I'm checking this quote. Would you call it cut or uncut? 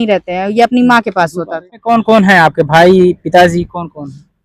cut